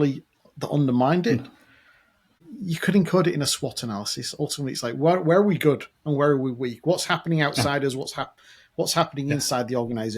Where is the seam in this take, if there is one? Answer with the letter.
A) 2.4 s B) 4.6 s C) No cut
A